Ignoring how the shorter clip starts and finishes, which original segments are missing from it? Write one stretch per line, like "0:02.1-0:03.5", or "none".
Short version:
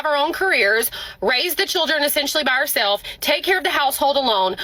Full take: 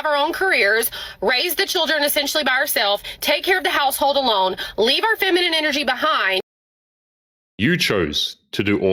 none